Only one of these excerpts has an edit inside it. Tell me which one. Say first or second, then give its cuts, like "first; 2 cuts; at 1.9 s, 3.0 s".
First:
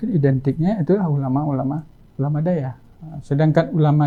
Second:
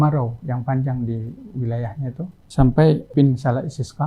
second; 2 cuts; at 2.4 s, 3.1 s